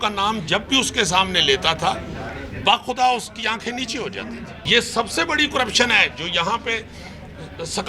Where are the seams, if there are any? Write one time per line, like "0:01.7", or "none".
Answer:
0:04.6